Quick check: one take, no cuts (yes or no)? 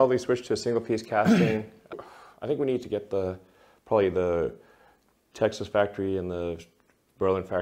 yes